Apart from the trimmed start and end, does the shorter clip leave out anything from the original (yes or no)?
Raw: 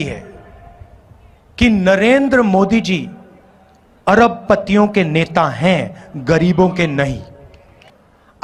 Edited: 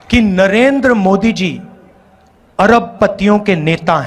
no